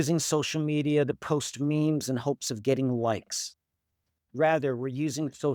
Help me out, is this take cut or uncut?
uncut